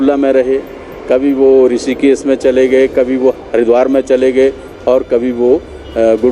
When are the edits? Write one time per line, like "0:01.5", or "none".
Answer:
0:03.4

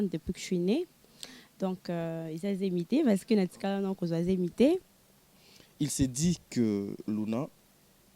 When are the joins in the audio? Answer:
0:04.9

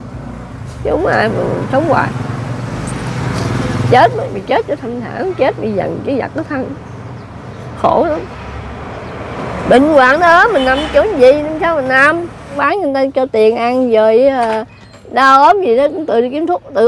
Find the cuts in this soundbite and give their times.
0:12.6

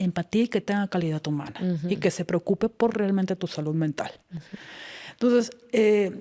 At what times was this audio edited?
none

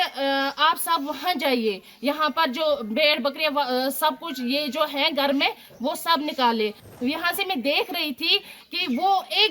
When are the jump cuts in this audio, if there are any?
0:06.8

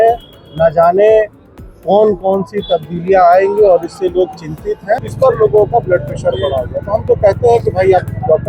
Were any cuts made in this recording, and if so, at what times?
0:05.1

